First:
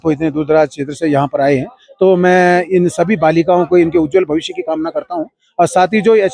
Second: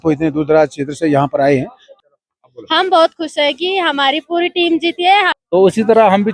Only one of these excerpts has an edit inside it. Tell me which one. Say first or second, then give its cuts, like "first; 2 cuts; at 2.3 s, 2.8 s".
second; 2 cuts; at 1.8 s, 5.3 s